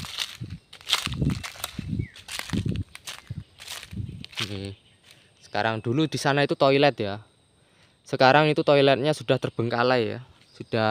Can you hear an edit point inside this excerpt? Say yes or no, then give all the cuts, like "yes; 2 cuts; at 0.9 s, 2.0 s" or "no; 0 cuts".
no; 0 cuts